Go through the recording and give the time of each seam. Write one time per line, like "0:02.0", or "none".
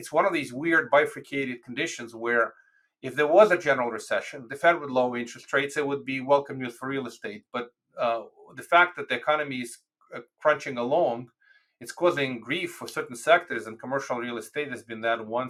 none